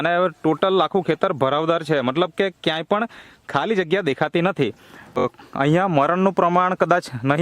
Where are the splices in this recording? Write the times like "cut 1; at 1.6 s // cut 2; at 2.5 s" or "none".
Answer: cut 1; at 5.2 s

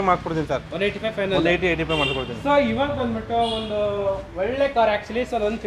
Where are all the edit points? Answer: none

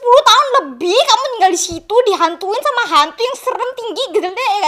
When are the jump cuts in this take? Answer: none

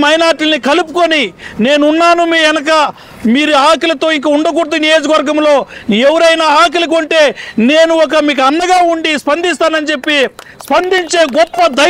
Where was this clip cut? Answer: none

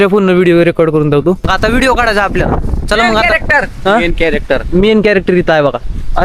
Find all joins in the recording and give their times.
cut 1; at 1.5 s

